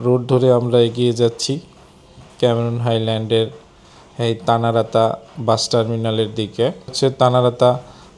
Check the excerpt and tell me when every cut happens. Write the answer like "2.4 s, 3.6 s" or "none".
6.9 s